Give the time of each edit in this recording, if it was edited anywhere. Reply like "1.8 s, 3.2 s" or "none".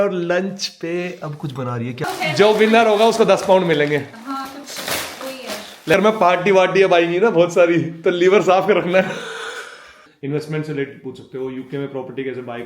2.1 s, 5.9 s, 10.0 s

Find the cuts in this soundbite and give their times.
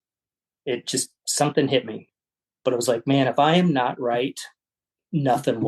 2.0 s

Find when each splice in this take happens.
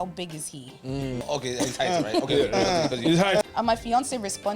1.2 s, 3.4 s

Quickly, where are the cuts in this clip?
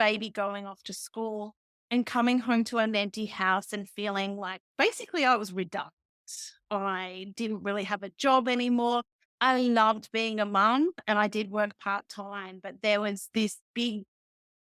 none

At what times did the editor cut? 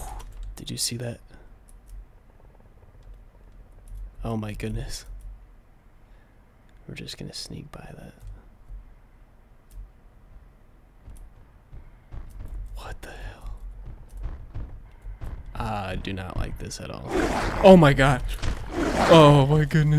none

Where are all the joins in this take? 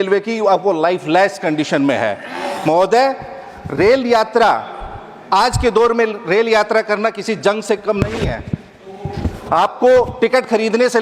none

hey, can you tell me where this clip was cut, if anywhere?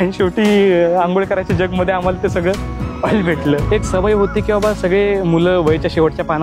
3.6 s

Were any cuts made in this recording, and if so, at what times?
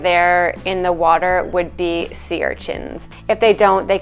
3.0 s

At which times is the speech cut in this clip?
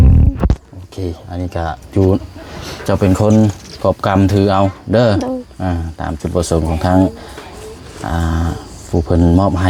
none

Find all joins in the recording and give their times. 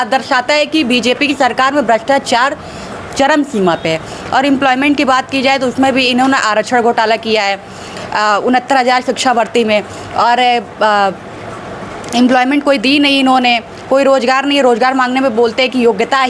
none

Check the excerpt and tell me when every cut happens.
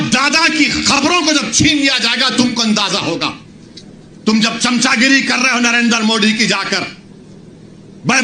none

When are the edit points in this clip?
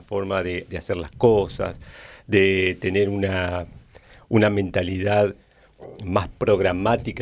none

